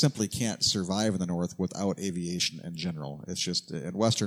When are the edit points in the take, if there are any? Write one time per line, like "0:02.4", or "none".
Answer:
none